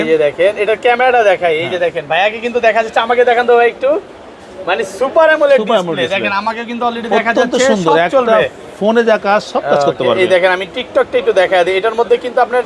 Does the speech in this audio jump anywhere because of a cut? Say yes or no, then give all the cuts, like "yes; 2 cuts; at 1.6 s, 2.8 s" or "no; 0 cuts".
no; 0 cuts